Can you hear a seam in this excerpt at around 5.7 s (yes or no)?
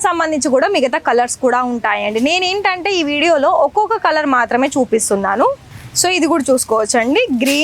yes